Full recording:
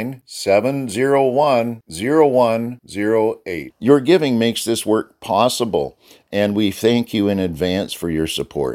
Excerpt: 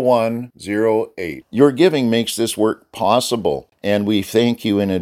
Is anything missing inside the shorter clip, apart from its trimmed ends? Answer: yes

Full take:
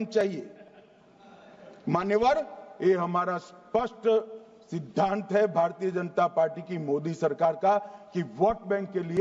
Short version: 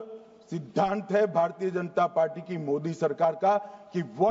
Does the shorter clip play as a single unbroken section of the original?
yes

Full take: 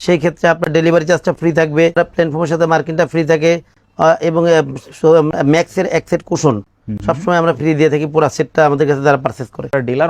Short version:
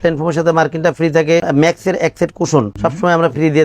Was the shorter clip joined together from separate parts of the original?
yes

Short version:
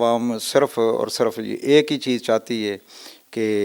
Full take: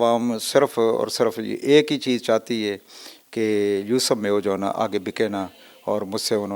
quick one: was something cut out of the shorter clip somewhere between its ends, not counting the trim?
no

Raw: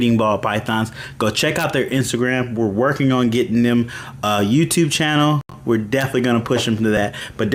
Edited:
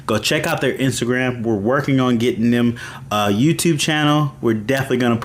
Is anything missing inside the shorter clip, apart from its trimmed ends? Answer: yes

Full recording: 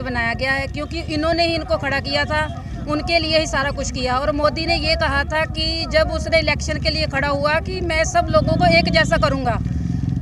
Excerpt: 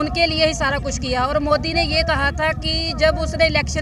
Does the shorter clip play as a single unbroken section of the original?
yes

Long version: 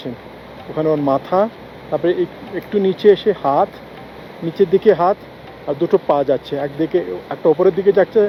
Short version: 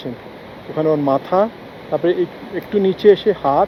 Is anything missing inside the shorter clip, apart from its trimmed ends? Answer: no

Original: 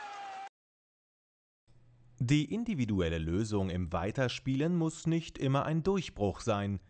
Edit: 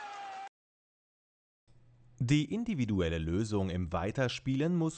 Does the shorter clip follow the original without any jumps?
yes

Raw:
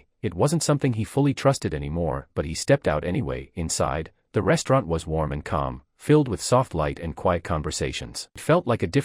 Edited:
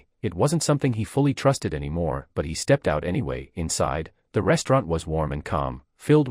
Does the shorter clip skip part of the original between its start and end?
no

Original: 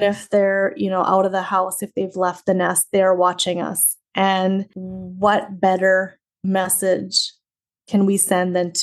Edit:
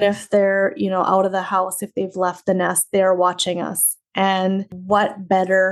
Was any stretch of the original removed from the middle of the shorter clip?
yes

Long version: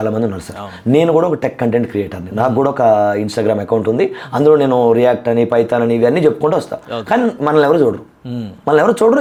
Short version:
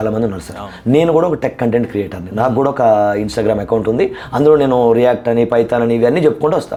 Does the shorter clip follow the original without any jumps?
yes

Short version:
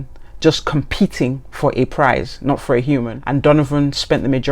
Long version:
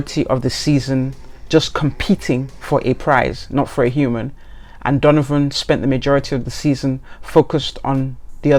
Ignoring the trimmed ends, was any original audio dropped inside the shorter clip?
yes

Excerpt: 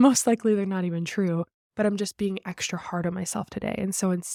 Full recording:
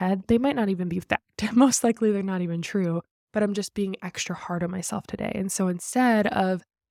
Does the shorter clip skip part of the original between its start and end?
no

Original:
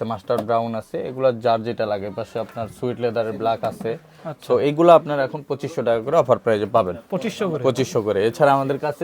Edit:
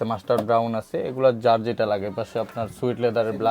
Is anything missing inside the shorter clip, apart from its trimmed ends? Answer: no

